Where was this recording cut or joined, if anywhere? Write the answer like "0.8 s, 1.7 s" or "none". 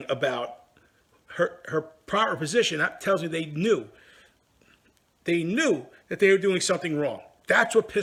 none